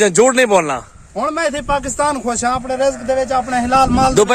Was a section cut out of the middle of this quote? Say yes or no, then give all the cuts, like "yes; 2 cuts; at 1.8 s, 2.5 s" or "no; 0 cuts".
no; 0 cuts